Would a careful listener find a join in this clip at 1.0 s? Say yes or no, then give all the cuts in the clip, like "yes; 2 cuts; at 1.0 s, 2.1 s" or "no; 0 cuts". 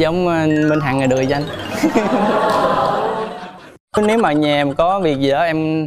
no; 1 cut; at 3.7 s